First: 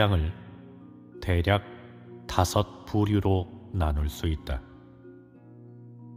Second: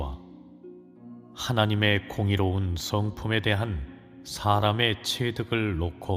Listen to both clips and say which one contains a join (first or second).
second